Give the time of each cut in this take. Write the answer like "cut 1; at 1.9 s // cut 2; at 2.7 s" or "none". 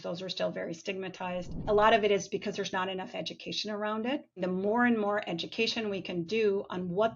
cut 1; at 1.6 s // cut 2; at 4.4 s